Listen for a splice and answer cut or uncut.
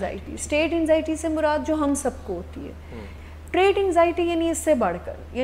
cut